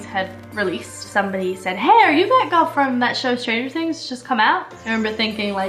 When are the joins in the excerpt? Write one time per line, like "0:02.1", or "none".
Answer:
0:01.1